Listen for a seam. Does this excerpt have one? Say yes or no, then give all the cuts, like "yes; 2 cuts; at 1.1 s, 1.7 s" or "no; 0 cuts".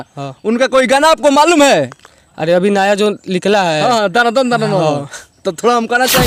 no; 0 cuts